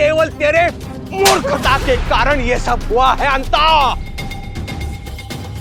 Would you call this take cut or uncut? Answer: uncut